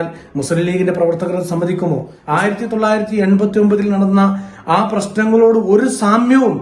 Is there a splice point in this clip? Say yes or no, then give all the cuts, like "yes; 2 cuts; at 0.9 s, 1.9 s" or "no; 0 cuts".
yes; 1 cut; at 2.1 s